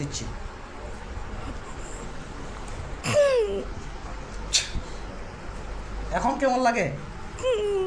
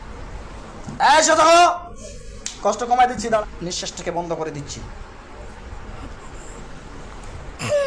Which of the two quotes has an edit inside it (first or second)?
second